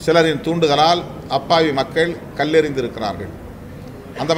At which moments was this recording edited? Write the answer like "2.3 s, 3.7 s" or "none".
none